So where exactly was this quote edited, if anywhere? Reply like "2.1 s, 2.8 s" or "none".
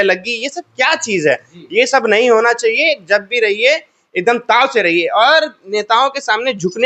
none